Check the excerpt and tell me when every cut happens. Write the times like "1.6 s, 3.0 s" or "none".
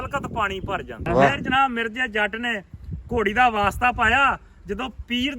1.4 s